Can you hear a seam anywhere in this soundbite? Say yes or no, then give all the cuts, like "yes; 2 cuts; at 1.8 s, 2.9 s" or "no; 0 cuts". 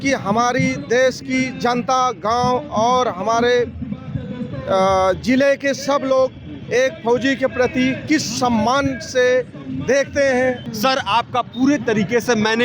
no; 0 cuts